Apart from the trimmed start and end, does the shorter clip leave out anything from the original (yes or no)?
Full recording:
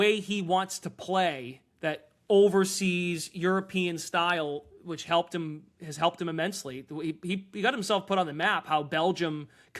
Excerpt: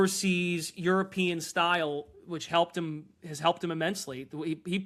no